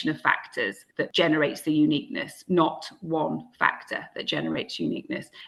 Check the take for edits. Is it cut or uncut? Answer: uncut